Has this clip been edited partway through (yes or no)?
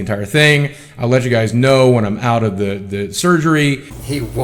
no